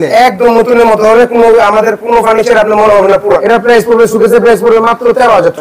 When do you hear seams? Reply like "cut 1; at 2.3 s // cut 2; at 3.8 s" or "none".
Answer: cut 1; at 3.4 s